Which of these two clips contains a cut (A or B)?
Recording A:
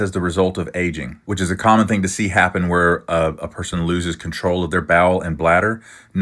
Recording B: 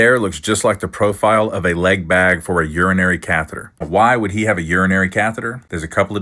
B